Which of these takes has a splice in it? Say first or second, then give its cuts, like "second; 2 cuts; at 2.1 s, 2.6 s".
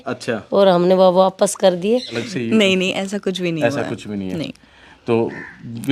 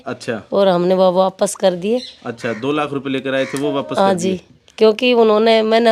first; 1 cut; at 2.1 s